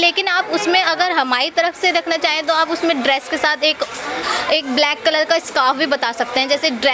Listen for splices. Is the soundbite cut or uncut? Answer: uncut